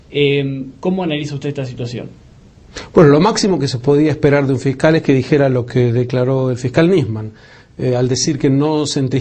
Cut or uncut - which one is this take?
cut